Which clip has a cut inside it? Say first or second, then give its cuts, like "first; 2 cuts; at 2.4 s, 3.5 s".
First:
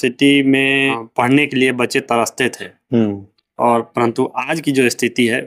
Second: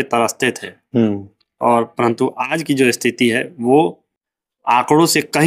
first; 1 cut; at 1.0 s